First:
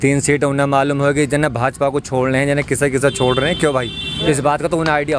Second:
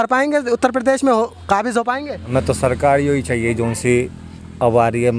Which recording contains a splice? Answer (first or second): second